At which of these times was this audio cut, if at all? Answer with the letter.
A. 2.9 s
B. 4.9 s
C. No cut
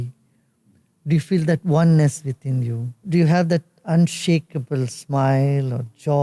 A